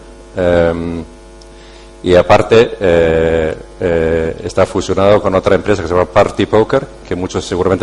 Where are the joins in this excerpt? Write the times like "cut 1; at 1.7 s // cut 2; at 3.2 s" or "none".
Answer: cut 1; at 5.5 s